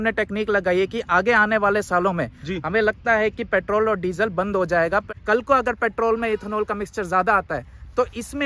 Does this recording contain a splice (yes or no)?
yes